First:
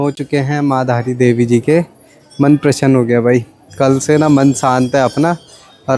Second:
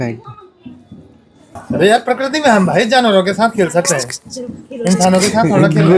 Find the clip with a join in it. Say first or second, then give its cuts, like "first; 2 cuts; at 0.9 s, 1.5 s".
second; 1 cut; at 1.6 s